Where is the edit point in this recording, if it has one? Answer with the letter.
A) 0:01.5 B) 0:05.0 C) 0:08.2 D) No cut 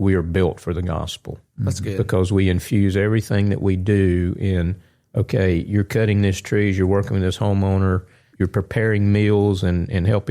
C